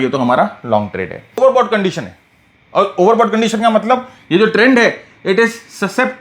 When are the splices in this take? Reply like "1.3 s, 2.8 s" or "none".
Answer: 1.4 s